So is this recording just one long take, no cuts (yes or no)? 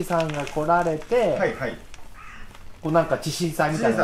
yes